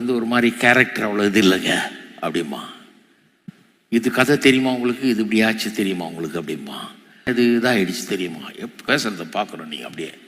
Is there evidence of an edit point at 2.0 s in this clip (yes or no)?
no